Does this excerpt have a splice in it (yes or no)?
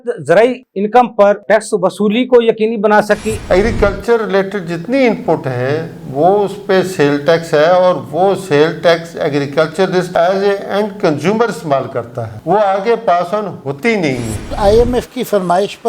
yes